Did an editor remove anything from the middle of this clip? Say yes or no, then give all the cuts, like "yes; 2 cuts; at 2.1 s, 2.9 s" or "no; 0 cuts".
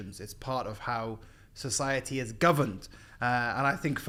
no; 0 cuts